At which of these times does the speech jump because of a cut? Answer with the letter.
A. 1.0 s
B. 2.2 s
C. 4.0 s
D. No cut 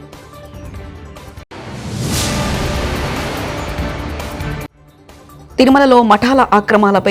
A